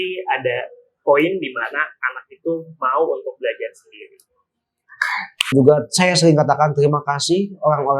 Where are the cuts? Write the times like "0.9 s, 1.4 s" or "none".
5.5 s

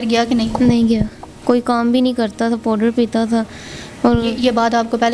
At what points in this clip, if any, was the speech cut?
none

